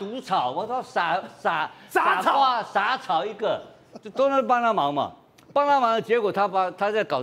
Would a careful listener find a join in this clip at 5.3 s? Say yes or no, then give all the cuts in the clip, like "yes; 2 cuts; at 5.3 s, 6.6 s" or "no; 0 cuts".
no; 0 cuts